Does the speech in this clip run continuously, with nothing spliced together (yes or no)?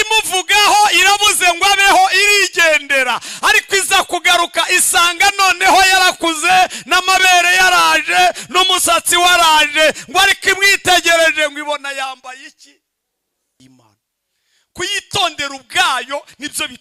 no